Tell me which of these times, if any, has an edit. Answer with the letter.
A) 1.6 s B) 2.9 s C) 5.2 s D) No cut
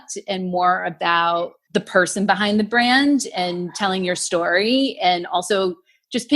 A